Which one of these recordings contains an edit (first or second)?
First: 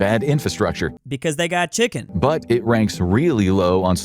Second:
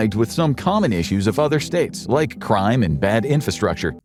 first